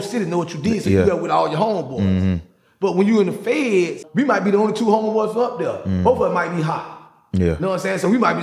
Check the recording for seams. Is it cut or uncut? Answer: cut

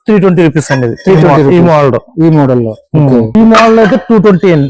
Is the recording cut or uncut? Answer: uncut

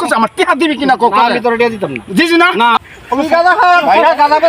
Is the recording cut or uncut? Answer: cut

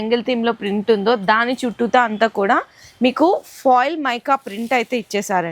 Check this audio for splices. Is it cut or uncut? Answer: uncut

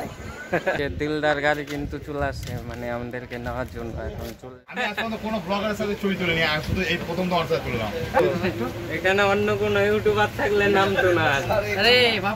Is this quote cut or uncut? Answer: cut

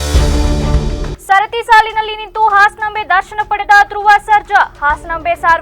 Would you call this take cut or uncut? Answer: cut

